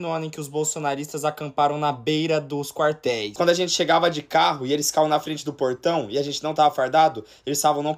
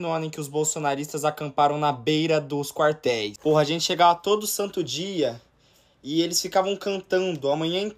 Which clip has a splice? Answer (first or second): first